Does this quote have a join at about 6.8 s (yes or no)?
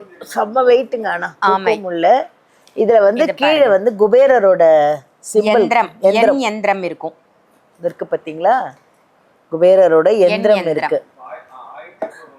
no